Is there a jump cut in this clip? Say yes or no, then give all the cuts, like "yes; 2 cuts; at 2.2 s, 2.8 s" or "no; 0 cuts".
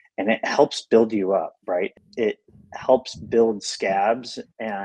yes; 1 cut; at 1.9 s